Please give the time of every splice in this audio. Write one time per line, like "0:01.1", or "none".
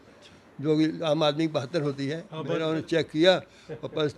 0:02.3